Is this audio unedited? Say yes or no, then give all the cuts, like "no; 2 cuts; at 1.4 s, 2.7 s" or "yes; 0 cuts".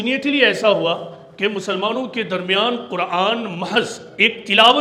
yes; 0 cuts